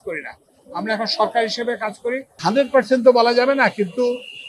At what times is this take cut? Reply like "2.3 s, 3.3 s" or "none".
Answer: 2.3 s